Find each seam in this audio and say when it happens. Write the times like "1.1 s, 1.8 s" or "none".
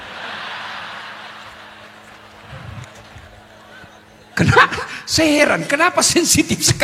none